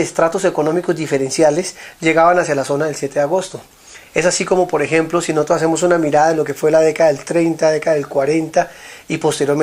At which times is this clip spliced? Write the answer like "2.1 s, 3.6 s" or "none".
1.0 s